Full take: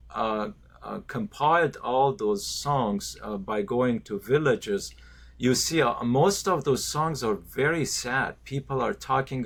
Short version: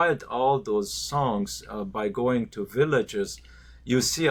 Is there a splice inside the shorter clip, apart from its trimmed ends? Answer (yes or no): no